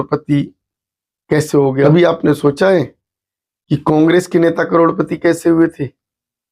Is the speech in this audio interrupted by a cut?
yes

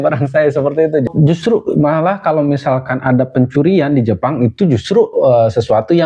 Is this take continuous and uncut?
no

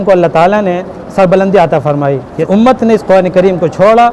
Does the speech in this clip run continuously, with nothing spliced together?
no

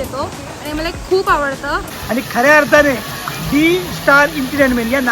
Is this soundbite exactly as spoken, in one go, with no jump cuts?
no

